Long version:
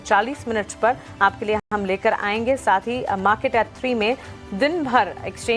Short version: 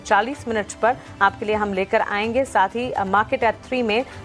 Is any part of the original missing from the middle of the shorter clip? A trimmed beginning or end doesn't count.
yes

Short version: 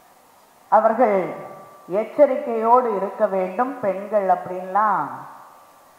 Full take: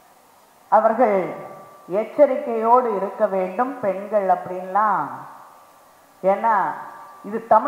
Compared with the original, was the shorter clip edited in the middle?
no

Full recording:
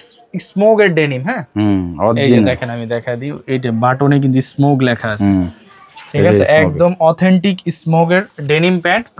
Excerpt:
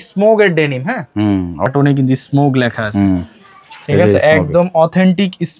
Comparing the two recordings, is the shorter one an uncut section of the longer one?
no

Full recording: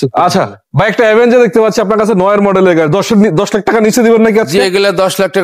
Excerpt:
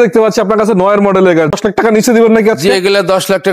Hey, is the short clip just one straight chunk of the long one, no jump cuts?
no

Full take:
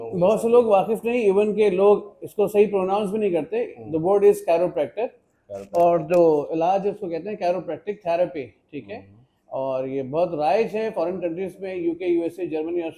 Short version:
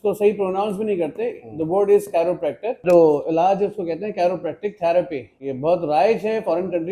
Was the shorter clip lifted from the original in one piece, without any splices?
no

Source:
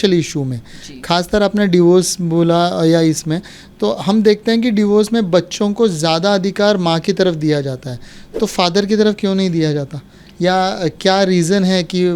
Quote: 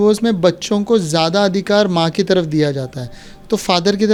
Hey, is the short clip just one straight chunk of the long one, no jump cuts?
yes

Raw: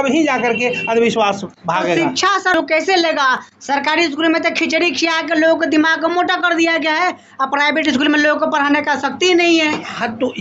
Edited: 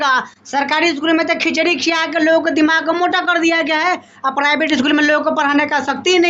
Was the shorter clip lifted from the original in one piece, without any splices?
yes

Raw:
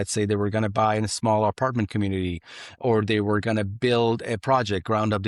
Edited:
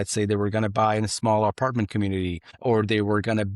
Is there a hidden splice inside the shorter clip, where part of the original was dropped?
yes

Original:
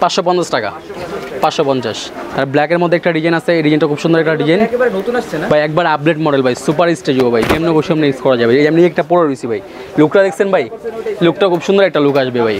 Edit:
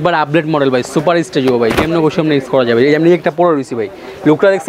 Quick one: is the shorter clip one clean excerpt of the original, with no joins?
yes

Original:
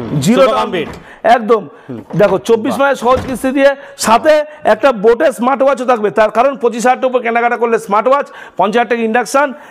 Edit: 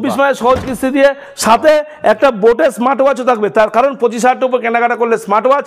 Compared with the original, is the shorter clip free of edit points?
yes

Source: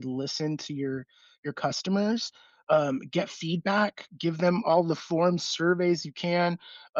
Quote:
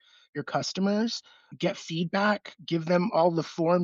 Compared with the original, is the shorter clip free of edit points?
no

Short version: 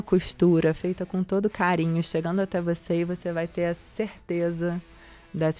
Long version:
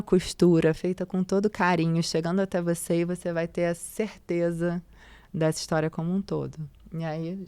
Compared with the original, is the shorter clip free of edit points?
yes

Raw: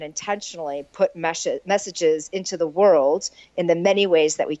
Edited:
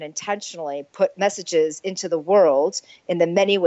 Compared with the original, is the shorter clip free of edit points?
no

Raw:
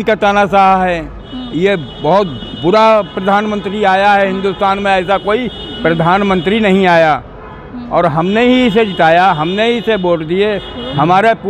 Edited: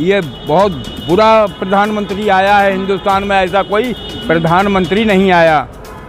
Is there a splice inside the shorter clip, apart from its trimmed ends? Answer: no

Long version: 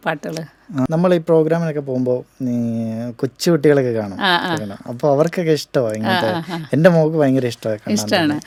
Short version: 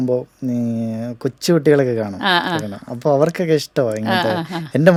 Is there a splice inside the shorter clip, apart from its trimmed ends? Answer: no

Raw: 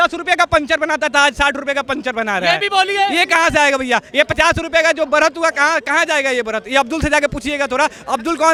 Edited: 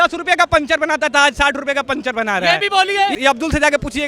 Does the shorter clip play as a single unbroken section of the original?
no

